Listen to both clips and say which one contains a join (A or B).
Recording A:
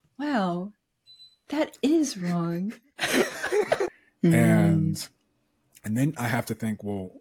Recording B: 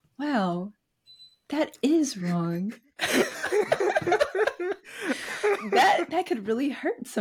A